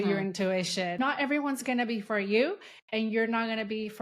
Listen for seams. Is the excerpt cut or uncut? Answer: cut